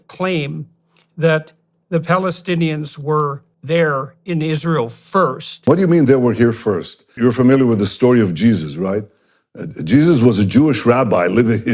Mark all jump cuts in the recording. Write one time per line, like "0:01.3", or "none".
0:03.5
0:05.7
0:07.1